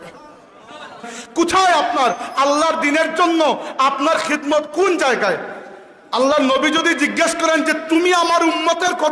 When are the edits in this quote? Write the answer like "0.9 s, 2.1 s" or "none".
1.0 s